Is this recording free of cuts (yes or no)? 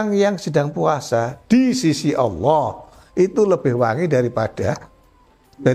yes